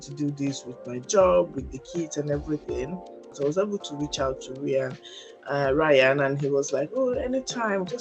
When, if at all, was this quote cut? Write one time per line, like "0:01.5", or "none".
0:03.3